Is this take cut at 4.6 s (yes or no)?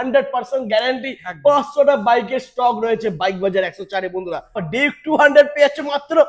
yes